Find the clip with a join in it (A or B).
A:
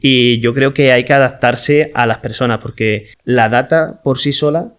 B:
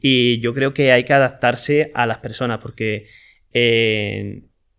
A